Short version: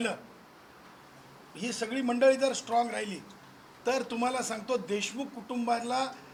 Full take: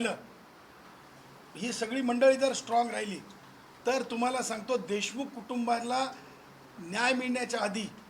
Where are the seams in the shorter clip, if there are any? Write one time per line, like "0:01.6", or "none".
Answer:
none